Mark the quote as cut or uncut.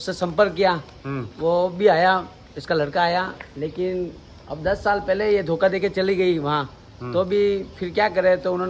uncut